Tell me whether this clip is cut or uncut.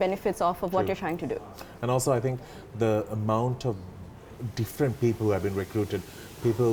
uncut